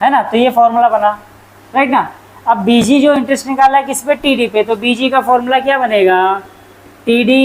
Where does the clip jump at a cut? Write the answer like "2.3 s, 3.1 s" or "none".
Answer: none